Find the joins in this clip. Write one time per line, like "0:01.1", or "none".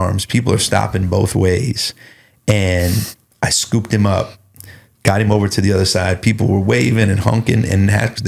none